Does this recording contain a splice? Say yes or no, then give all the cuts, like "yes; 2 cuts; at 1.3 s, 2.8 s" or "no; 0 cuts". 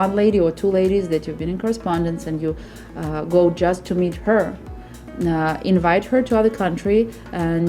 no; 0 cuts